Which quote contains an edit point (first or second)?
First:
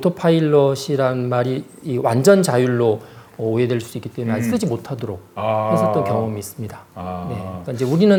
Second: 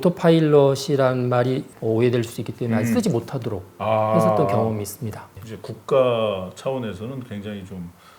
second